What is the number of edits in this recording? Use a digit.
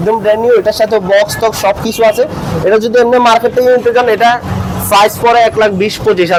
0